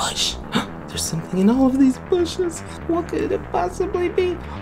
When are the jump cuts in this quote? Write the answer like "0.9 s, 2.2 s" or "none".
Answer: 1.0 s, 2.7 s

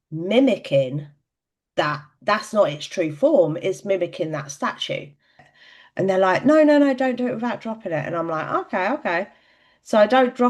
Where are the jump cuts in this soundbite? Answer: 5.5 s

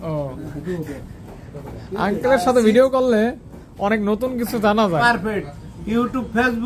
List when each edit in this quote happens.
5.0 s

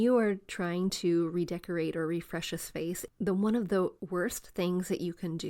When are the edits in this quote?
3.0 s, 4.0 s

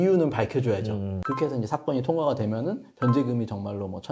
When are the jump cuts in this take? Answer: 1.1 s

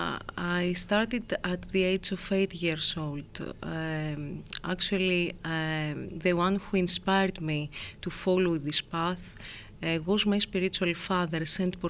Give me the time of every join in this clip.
none

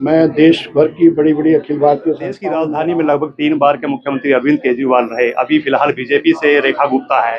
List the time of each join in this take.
2.5 s

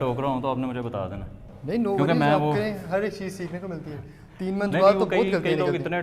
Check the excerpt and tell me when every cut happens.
none

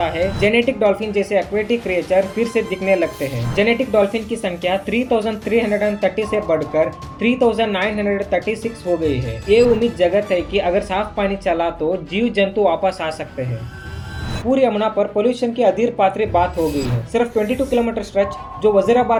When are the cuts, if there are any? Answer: none

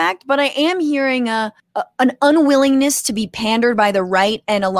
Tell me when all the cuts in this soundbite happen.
1.6 s

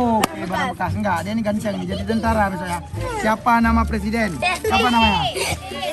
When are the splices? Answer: none

